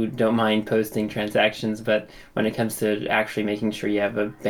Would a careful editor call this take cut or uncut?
uncut